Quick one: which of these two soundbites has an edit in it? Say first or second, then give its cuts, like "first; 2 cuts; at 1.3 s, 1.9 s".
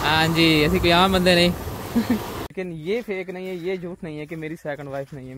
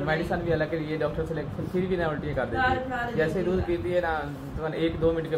first; 1 cut; at 2.5 s